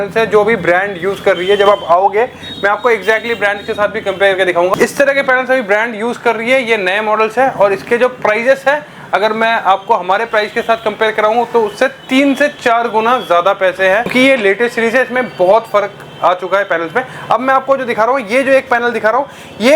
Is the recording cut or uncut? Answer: uncut